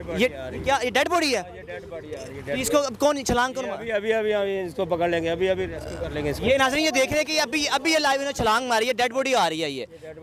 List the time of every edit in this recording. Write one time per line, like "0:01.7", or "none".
none